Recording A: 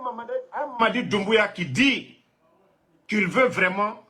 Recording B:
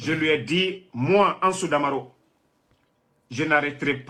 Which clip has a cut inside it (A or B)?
A